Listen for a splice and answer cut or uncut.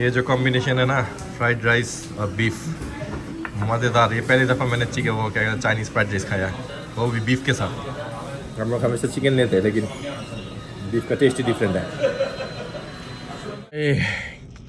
uncut